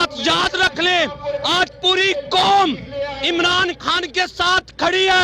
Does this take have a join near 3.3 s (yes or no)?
no